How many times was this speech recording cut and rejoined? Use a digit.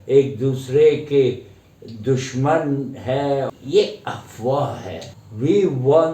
2